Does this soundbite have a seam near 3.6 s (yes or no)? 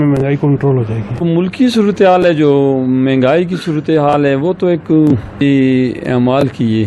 no